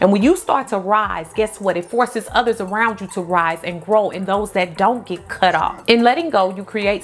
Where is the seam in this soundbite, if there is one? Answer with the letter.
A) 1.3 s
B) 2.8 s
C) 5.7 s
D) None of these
C